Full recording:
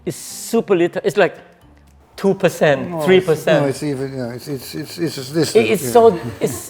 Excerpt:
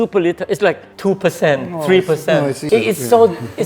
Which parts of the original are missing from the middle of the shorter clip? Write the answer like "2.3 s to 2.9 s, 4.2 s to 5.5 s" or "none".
1.4 s to 2.1 s, 3.9 s to 5.5 s